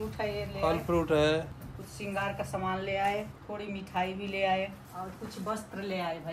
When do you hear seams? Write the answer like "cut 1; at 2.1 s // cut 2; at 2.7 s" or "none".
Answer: cut 1; at 1.5 s // cut 2; at 3.3 s // cut 3; at 4.8 s